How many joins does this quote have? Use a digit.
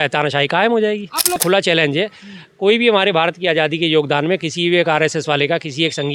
1